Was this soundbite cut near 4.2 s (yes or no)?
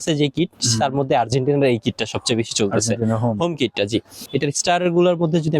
yes